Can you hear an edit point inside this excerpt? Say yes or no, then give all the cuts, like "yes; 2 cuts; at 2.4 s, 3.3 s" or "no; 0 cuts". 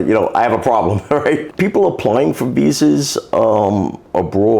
yes; 1 cut; at 1.5 s